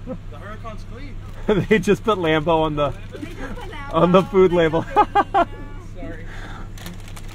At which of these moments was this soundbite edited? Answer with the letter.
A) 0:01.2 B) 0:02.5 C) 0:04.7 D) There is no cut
A